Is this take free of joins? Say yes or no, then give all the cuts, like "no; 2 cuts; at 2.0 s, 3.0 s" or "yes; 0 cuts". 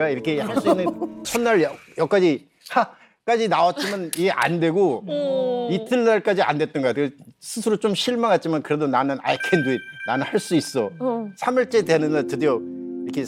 no; 1 cut; at 1.3 s